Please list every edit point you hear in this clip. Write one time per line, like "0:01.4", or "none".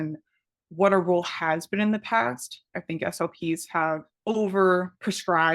0:02.7